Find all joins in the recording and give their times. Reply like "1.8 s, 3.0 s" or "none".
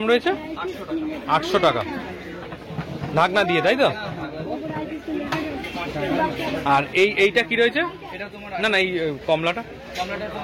none